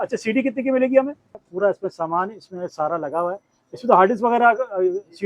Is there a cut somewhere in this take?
yes; 1 cut; at 1.5 s

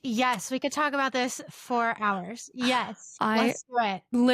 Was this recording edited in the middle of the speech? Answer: no; 0 cuts

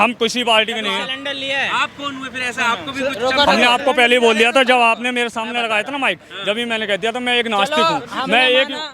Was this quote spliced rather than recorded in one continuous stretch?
no; 0 cuts

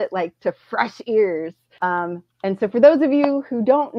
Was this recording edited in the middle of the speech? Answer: yes; 1 cut; at 1.6 s

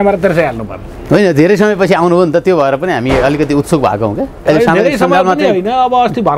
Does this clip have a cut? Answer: no; 0 cuts

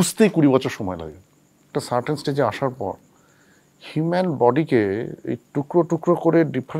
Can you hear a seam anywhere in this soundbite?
yes; 1 cut; at 1.7 s

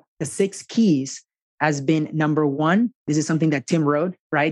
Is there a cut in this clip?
yes; 1 cut; at 2.5 s

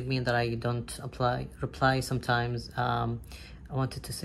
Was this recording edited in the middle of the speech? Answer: no; 0 cuts

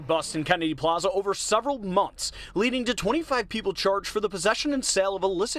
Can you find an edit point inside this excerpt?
no; 0 cuts

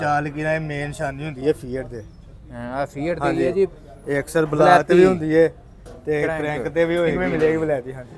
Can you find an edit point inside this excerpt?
yes; 1 cut; at 7.2 s

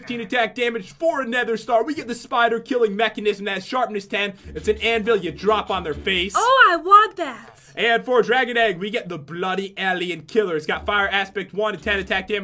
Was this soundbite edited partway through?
no; 0 cuts

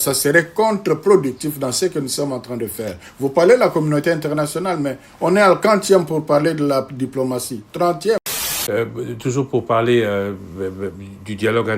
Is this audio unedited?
no; 1 cut; at 8.4 s

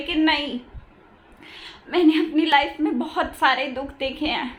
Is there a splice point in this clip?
no; 0 cuts

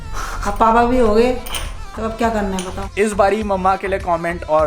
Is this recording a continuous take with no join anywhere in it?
no; 1 cut; at 2.8 s

